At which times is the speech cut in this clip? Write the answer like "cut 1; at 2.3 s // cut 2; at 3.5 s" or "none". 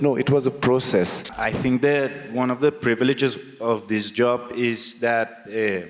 cut 1; at 1.4 s